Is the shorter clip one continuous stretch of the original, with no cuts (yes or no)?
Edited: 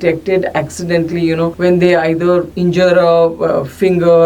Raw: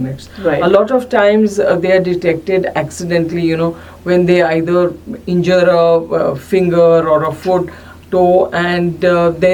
no